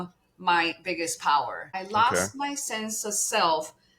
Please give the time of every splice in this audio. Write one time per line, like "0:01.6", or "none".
0:01.8